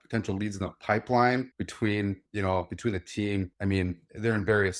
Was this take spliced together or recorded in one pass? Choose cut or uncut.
uncut